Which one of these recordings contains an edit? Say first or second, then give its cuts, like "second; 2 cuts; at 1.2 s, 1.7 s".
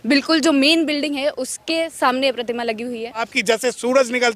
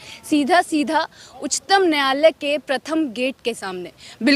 first; 1 cut; at 3.3 s